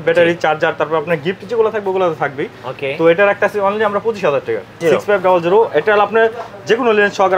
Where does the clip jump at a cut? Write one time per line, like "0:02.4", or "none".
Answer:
0:04.8